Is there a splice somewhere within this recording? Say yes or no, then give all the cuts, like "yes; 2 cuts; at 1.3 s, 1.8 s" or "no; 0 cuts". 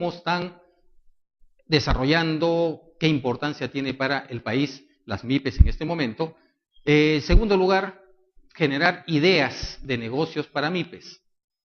yes; 1 cut; at 5.4 s